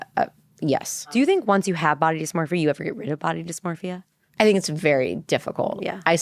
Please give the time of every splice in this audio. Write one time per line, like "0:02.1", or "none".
0:01.2
0:04.1